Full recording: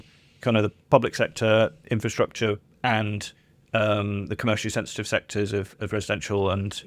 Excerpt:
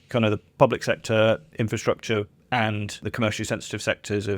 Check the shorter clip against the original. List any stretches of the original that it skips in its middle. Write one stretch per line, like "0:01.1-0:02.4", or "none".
0:03.3-0:04.3

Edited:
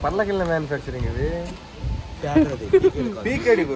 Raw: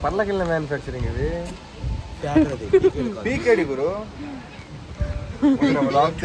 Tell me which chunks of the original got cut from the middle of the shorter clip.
none

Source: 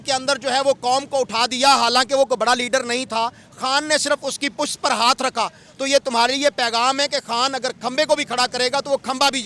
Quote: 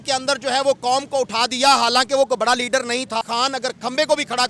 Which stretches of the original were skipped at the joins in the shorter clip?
0:03.2-0:07.2

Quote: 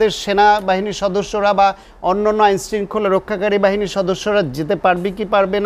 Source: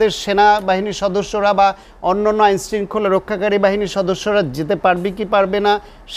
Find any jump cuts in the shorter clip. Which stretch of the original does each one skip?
none

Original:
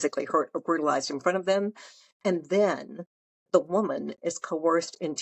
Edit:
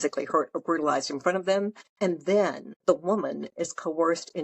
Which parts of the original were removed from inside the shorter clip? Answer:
0:01.8-0:02.1
0:02.9-0:03.3

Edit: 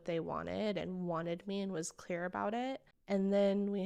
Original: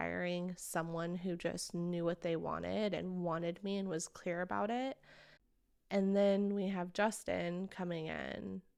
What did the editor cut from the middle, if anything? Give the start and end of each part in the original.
0:05.1-0:05.7

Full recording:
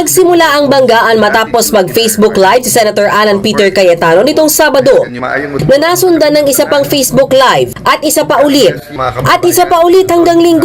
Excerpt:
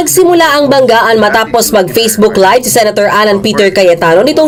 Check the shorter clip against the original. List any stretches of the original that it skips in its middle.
none

